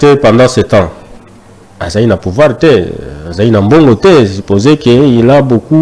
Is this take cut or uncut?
uncut